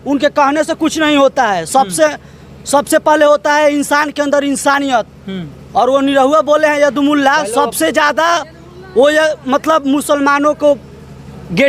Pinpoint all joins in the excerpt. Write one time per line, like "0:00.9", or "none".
none